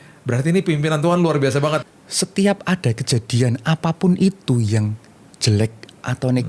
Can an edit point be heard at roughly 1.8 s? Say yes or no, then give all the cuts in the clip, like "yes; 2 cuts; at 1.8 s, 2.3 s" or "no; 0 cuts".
yes; 1 cut; at 1.8 s